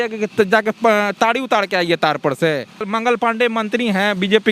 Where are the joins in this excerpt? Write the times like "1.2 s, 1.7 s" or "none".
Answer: 2.9 s